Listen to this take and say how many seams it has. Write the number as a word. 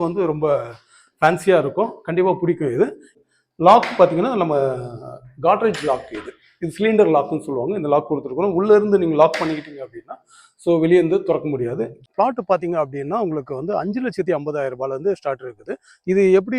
two